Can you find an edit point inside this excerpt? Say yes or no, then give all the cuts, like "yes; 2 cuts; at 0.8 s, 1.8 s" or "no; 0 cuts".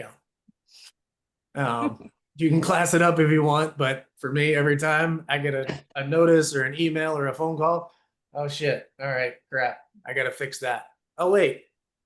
no; 0 cuts